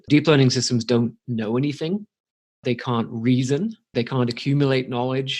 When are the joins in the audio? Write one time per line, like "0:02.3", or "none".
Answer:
0:02.6
0:03.9